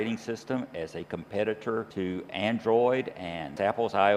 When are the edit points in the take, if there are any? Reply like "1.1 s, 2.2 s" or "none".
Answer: 1.9 s